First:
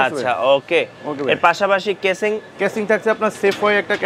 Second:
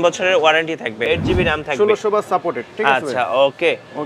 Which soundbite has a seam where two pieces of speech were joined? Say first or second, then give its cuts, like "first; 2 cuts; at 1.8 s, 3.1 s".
second; 1 cut; at 1.1 s